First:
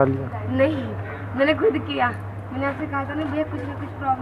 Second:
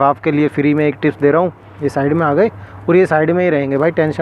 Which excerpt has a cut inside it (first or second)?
second